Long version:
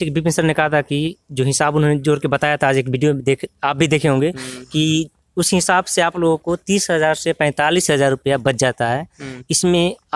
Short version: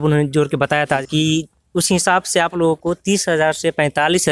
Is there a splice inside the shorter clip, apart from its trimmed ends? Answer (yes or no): yes